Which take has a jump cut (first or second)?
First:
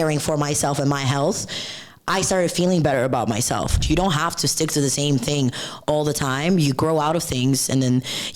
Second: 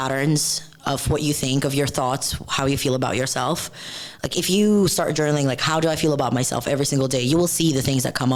first